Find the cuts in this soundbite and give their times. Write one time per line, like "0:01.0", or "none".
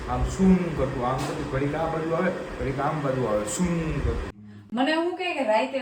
0:04.3